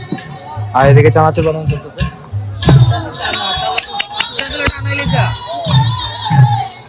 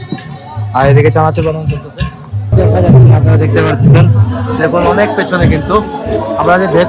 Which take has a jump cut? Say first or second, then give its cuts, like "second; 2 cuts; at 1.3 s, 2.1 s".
second; 1 cut; at 2.5 s